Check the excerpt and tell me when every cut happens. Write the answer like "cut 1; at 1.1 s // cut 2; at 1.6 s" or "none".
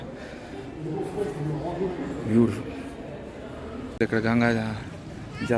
cut 1; at 4.0 s